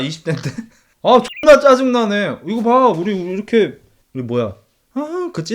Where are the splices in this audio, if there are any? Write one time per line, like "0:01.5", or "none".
0:03.9